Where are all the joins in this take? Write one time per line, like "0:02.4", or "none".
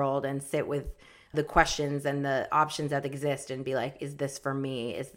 0:01.3